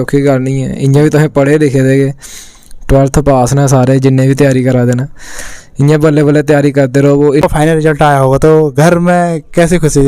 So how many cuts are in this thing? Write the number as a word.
one